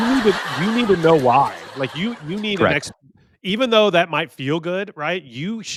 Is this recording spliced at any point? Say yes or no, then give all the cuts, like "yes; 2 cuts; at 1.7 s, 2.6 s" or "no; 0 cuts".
no; 0 cuts